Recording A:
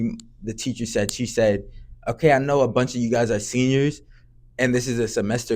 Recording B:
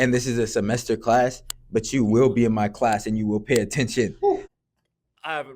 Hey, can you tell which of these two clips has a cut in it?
B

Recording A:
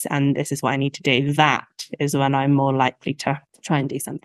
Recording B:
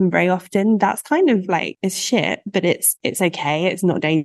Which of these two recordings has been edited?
B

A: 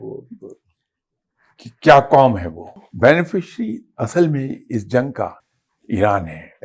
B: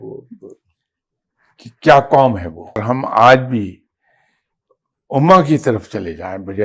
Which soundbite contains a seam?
B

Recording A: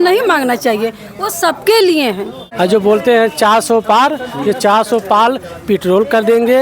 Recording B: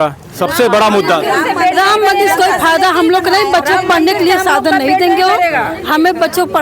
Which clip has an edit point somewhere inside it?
A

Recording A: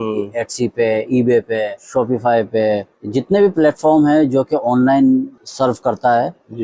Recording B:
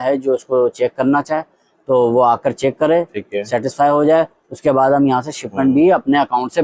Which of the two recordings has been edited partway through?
A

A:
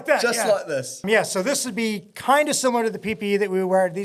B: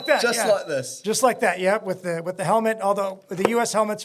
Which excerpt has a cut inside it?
A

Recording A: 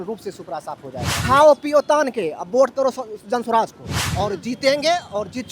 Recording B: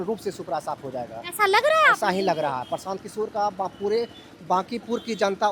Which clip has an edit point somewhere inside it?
A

